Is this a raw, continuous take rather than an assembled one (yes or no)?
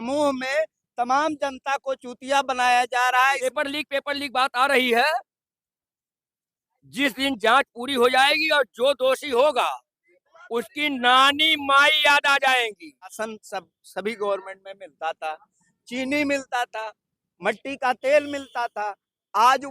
no